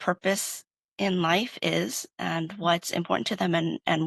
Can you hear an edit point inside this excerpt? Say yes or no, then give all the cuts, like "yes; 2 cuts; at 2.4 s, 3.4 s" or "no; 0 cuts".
no; 0 cuts